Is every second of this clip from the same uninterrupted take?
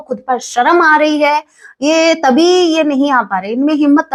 yes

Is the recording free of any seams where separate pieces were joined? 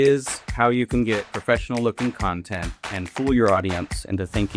yes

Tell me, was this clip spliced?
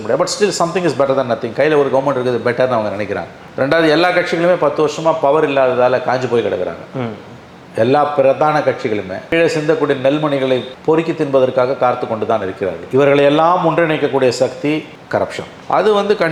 no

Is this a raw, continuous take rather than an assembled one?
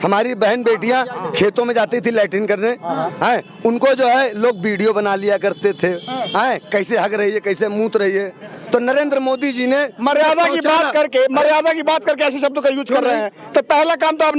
yes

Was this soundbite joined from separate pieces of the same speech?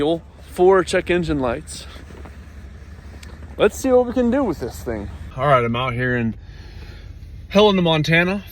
yes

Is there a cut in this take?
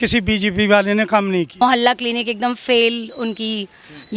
yes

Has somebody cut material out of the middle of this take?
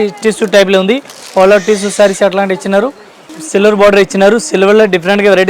yes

